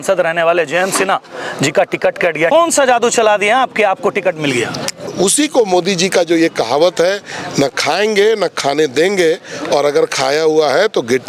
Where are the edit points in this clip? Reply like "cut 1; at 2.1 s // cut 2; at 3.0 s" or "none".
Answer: cut 1; at 2.5 s // cut 2; at 5.1 s